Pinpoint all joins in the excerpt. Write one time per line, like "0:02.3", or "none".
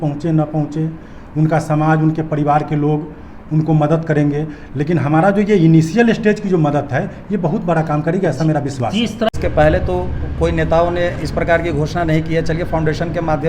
0:09.3